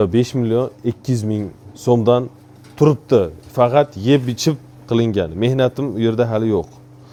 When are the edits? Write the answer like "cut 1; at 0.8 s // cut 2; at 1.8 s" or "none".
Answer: none